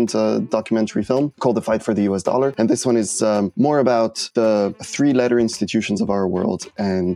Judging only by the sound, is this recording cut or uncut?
cut